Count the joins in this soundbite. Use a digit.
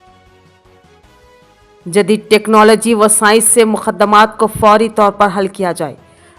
1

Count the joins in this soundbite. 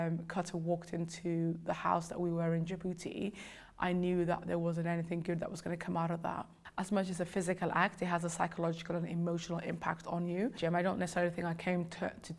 0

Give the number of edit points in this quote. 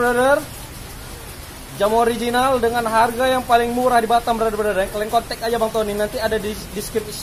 0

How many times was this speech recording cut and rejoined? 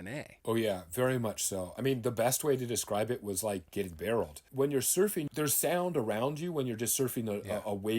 3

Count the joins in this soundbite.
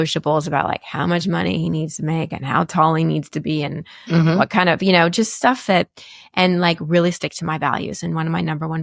0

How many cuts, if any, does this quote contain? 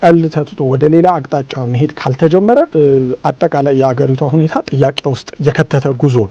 2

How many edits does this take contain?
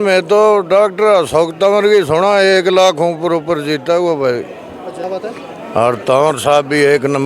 1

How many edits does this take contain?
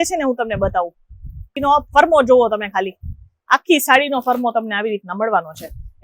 1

